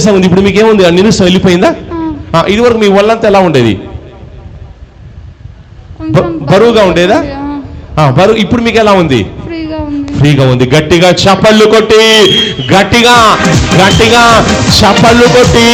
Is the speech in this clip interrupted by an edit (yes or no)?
no